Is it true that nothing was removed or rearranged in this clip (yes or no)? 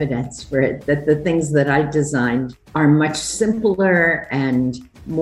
yes